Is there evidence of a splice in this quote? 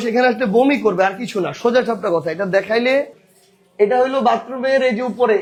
no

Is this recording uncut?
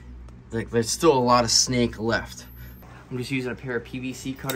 no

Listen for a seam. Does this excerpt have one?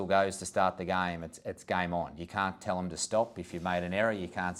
no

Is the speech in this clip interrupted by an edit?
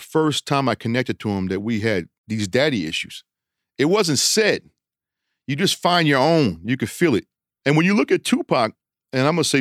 no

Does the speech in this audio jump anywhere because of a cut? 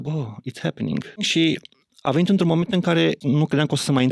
yes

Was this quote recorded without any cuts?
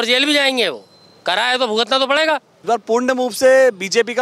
no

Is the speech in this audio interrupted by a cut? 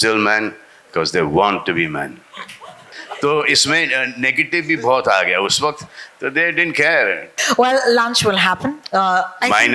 yes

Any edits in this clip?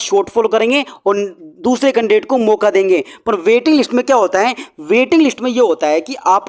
no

